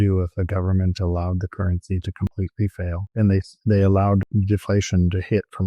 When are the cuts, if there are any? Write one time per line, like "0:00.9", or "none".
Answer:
0:02.6
0:04.3